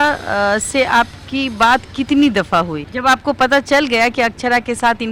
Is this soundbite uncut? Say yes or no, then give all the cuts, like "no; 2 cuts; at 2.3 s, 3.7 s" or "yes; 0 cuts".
yes; 0 cuts